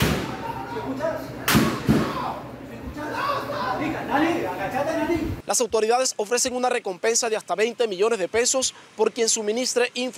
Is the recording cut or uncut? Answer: uncut